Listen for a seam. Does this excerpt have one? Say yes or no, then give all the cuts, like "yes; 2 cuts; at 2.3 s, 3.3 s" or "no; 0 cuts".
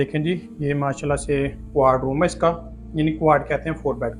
no; 0 cuts